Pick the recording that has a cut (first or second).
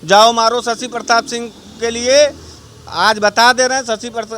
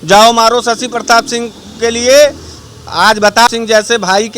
second